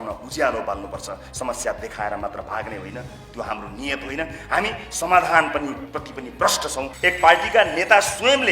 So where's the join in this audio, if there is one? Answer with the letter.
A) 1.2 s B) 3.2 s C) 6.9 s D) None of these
C